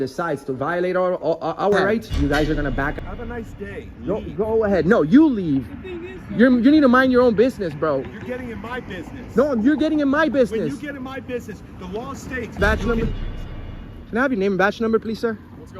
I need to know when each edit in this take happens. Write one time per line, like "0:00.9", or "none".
0:03.0
0:12.6

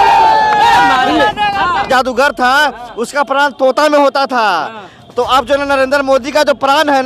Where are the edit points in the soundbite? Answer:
0:01.9

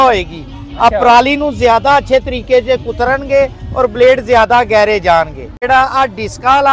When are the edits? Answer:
0:05.5

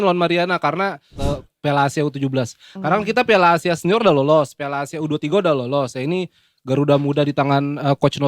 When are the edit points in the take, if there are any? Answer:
0:01.1

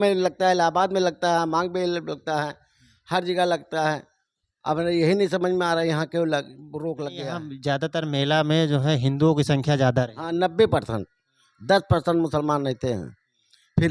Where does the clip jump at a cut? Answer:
0:07.1

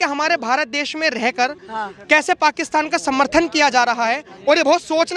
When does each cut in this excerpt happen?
none

